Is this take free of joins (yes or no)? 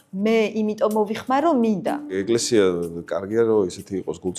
no